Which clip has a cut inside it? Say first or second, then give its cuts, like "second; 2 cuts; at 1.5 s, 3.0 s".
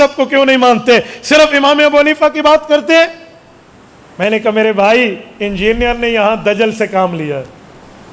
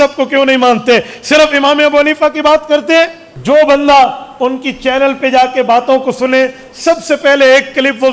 second; 1 cut; at 3.3 s